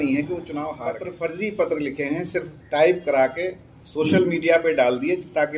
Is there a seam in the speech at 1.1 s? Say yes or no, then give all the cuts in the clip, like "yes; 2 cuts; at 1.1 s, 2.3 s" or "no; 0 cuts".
yes; 1 cut; at 1.1 s